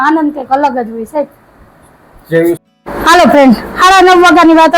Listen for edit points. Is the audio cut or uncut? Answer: uncut